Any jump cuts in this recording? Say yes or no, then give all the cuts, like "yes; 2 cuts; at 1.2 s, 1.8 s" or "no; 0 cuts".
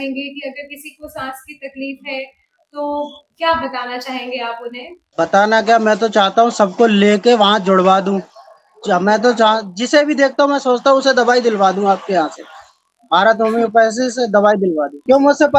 no; 0 cuts